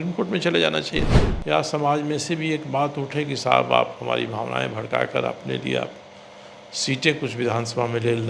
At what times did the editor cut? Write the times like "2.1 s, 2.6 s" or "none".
1.2 s